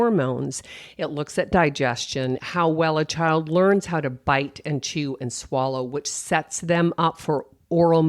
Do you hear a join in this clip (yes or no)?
yes